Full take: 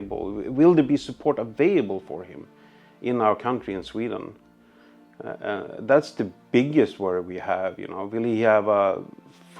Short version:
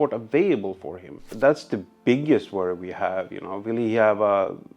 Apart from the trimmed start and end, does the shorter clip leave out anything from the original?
yes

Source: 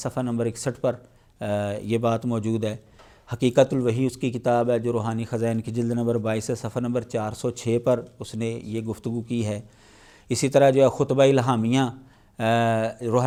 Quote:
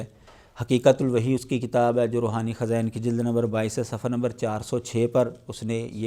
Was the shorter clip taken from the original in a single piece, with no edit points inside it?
yes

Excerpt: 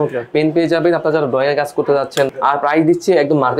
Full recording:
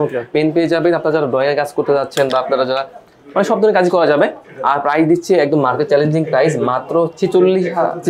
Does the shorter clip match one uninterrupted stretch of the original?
no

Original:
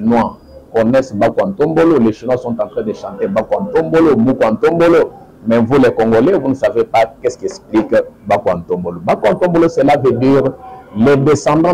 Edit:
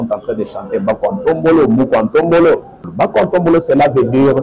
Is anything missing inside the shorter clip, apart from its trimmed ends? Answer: yes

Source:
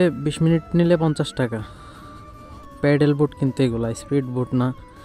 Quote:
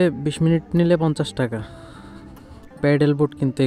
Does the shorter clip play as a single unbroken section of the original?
yes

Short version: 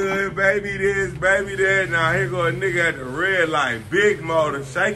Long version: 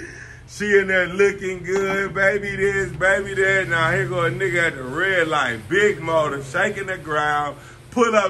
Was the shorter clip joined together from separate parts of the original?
no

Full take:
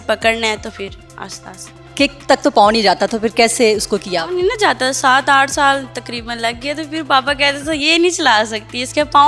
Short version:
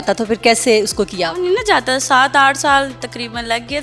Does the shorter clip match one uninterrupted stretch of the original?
yes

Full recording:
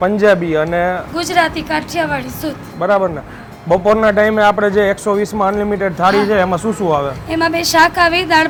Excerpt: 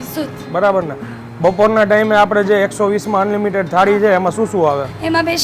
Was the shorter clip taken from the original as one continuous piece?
yes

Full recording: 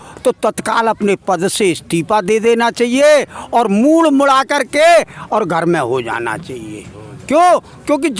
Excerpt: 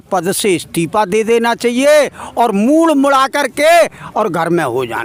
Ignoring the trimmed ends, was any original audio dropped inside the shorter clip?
no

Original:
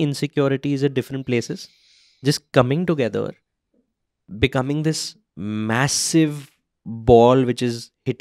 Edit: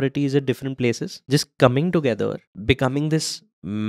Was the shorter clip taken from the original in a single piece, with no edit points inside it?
no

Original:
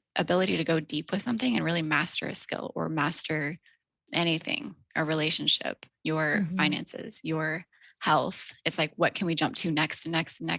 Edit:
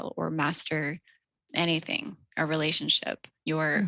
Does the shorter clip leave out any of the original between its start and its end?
no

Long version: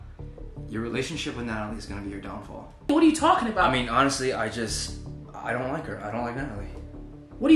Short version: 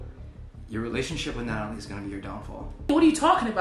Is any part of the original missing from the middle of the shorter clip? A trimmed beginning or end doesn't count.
no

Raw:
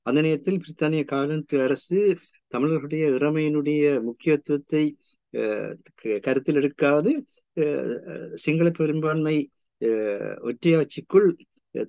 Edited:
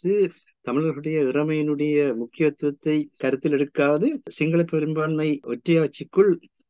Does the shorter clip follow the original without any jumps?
no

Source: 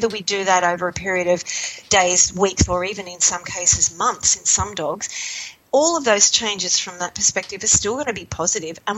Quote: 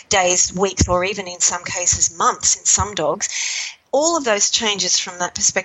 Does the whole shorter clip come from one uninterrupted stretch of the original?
yes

